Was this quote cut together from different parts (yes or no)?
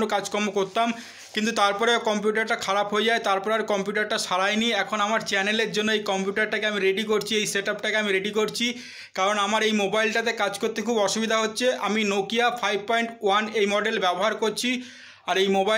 no